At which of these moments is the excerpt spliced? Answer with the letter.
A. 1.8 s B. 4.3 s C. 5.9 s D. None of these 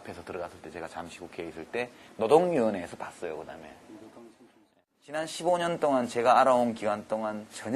A